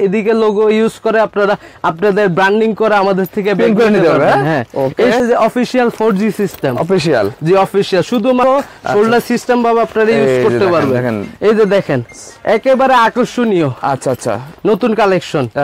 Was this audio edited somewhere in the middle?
yes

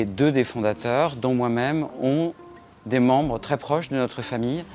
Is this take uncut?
yes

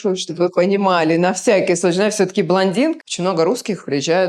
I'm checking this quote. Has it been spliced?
yes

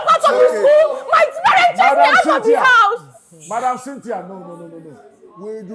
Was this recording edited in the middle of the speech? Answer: no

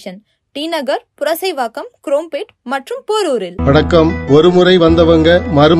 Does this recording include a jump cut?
yes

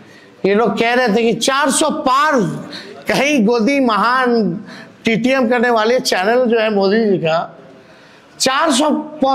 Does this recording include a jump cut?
no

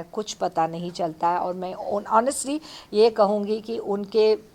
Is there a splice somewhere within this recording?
no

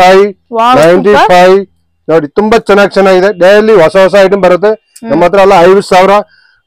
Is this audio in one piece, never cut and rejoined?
yes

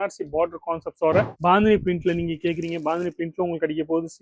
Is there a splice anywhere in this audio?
yes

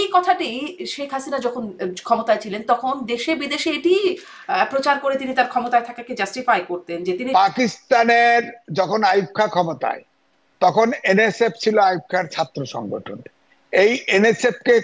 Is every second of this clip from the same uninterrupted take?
no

